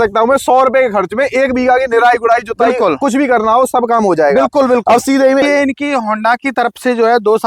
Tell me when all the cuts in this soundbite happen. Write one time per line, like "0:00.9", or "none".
0:05.4